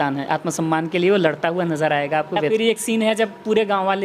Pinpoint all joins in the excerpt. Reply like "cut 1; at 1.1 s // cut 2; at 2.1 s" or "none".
cut 1; at 2.5 s